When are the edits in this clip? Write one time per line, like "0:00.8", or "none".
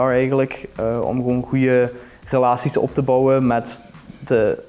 none